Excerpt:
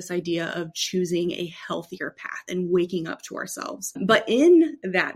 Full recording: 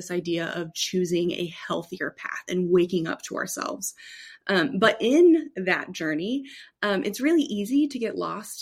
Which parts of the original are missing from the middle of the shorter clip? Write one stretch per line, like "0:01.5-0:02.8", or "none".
0:04.0-0:04.7